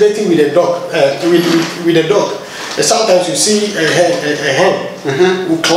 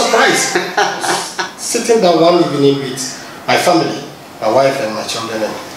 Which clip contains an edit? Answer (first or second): second